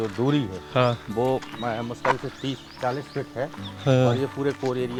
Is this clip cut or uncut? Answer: uncut